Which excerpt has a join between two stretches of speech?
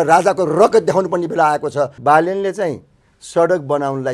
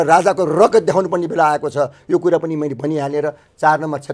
first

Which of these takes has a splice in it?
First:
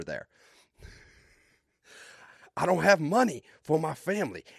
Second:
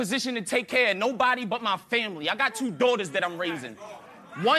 second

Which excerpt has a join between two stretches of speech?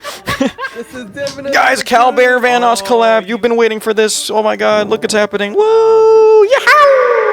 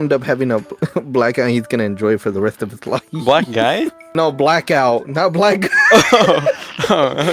second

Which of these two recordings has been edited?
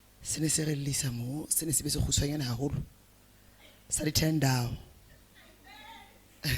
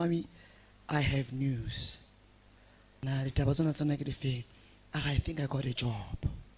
second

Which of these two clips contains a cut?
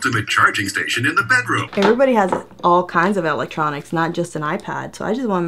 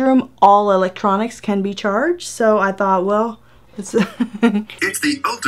first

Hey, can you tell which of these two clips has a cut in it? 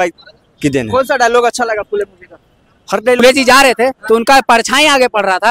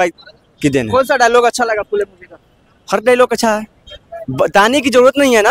first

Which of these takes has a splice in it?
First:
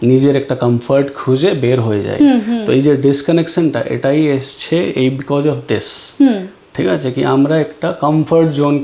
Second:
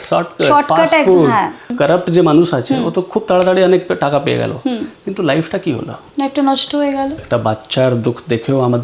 second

